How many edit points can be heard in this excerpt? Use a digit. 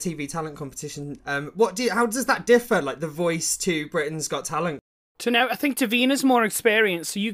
0